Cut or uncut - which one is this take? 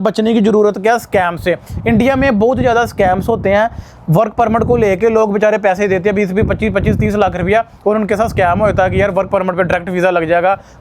uncut